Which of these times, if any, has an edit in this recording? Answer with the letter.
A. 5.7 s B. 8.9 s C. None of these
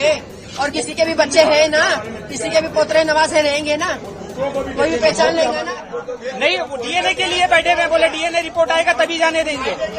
A